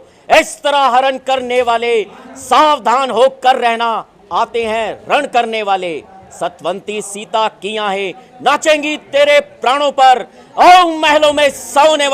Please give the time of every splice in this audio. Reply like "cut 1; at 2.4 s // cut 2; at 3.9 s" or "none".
none